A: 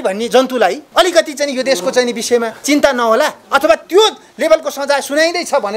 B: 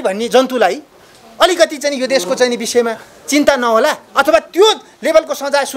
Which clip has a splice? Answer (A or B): A